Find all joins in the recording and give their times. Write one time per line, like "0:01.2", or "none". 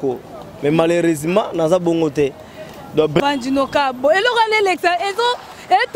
0:03.2